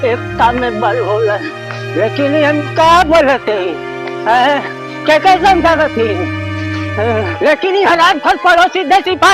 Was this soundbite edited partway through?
yes; 1 cut; at 7.3 s

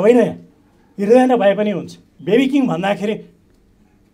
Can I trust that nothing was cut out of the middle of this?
no; 1 cut; at 2.1 s

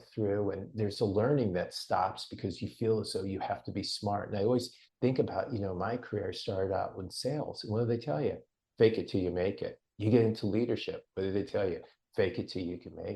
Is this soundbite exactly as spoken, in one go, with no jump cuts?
no; 1 cut; at 4.8 s

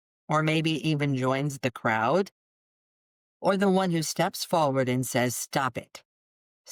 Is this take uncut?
yes; 0 cuts

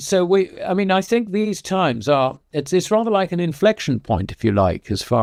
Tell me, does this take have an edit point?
no; 0 cuts

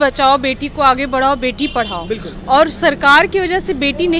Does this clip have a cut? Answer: no; 0 cuts

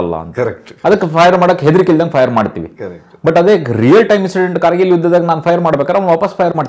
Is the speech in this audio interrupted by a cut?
no; 0 cuts

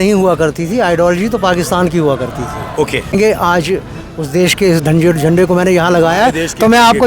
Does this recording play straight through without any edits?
no; 1 cut; at 3.1 s

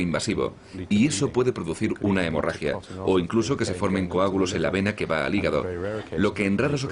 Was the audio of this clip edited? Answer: yes; 1 cut; at 2.3 s

